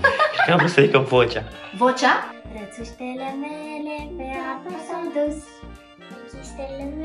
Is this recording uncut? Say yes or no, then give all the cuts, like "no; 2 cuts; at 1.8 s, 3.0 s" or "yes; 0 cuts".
no; 1 cut; at 2.4 s